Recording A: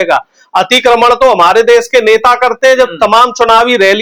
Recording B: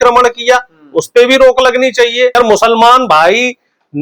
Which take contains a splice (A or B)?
B